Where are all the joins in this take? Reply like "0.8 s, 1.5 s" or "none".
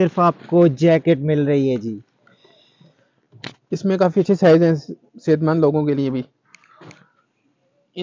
none